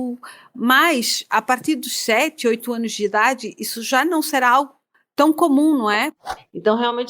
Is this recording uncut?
no; 1 cut; at 6.2 s

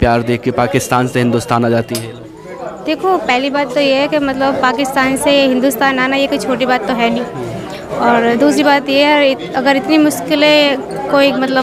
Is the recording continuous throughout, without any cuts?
yes; 0 cuts

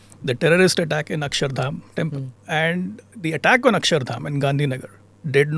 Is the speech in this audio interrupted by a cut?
yes; 2 cuts; at 2.3 s, 3.0 s

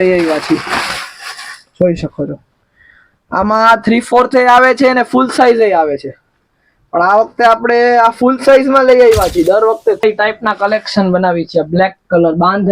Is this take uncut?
no; 1 cut; at 10.0 s

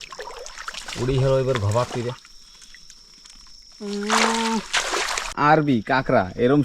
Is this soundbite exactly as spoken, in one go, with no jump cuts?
no; 1 cut; at 5.3 s

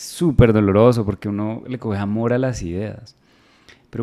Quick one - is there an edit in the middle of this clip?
no; 0 cuts

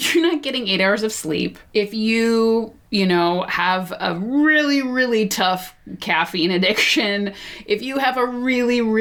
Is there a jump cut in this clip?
yes; 2 cuts; at 1.6 s, 2.8 s

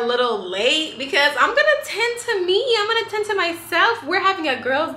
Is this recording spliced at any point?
no; 0 cuts

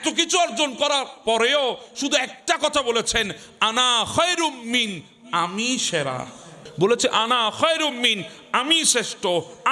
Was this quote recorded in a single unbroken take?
no; 1 cut; at 6.6 s

